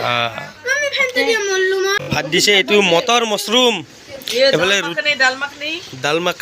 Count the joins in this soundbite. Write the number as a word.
one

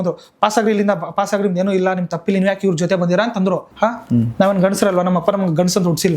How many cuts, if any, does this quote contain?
one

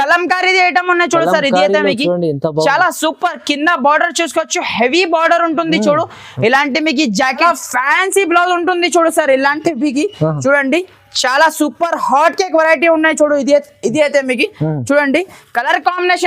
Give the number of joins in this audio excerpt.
one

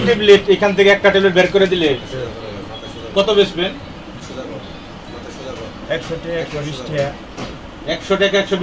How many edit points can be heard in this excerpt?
zero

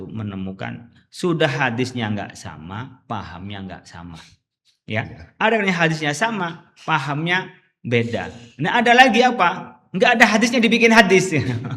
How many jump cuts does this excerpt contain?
zero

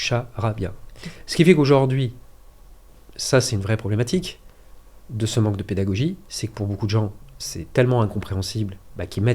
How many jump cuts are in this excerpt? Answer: zero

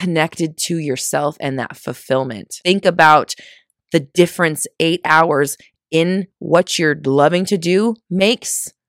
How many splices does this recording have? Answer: one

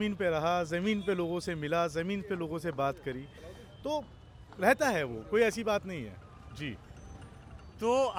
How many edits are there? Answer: zero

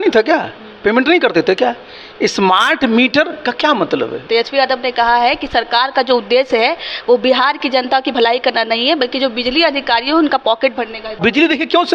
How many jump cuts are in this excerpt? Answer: two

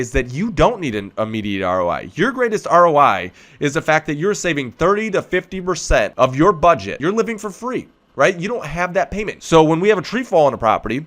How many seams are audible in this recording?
three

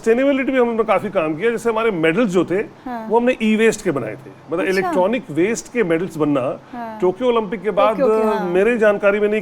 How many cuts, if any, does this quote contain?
zero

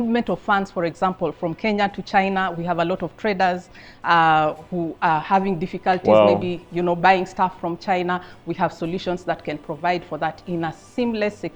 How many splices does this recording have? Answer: zero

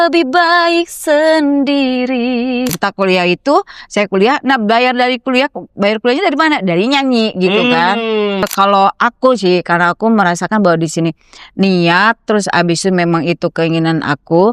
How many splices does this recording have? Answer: two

